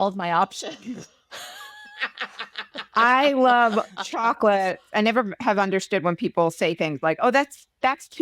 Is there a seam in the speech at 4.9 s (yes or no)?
yes